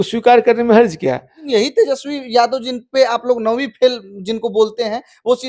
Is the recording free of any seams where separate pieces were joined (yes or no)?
no